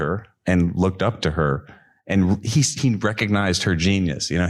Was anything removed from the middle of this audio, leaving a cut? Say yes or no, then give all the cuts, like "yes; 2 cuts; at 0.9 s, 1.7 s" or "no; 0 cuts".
no; 0 cuts